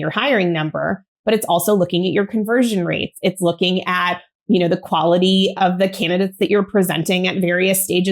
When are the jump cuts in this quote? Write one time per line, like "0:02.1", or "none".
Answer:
0:05.5

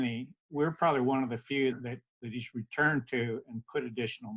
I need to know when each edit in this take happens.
0:01.8

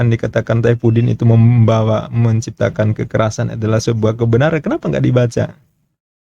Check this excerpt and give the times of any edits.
none

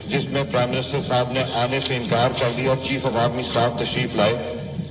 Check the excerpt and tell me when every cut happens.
none

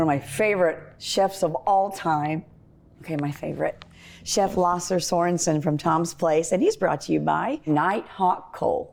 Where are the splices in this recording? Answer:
none

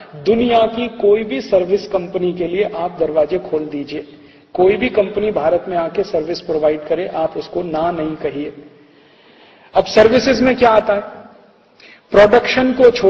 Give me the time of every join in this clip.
none

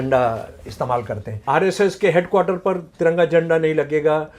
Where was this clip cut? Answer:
0:01.3

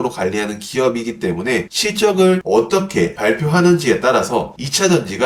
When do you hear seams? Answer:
none

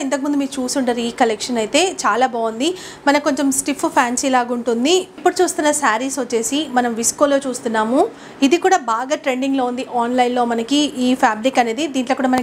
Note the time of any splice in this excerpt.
0:05.2

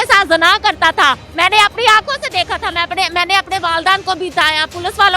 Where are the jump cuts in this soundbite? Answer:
0:01.3

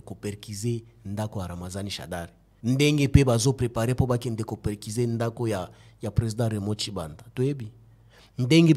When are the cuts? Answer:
0:02.4

